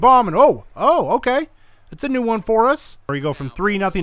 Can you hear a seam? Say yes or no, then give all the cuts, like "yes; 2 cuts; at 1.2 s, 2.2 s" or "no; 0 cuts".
yes; 1 cut; at 3.1 s